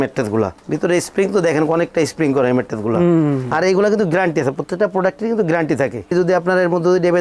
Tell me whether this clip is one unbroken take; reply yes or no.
no